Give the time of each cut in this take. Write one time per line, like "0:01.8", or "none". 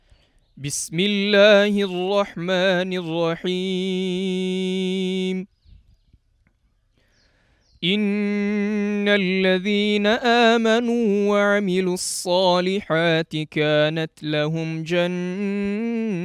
none

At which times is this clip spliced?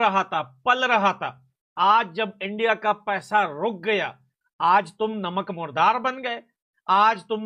none

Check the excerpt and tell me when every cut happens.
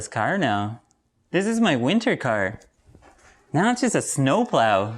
none

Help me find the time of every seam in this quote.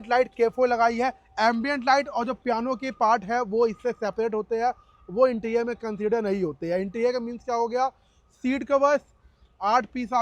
none

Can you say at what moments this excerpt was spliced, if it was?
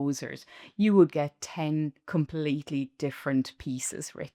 none

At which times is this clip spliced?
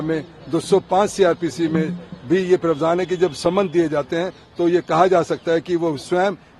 none

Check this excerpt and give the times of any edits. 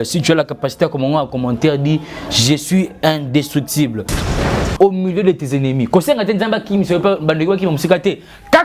0:04.4

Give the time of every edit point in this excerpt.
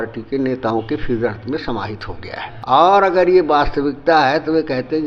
none

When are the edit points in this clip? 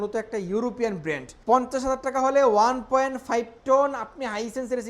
0:01.3

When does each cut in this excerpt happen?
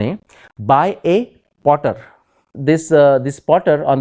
0:02.5

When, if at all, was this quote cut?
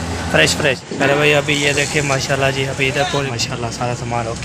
0:00.9
0:03.3

